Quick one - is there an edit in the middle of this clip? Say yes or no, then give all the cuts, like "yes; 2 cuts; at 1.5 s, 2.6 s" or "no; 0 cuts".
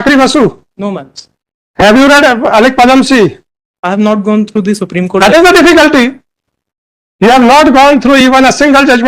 no; 0 cuts